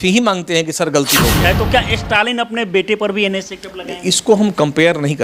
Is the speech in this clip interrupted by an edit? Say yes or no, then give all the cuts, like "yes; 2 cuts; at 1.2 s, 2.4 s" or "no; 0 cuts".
yes; 1 cut; at 1.4 s